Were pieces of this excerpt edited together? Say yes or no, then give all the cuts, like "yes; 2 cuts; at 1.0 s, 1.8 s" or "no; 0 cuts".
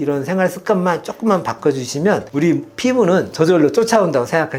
no; 0 cuts